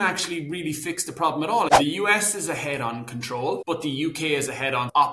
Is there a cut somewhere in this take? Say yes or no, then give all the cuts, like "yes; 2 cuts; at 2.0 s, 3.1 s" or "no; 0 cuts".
yes; 2 cuts; at 1.7 s, 3.6 s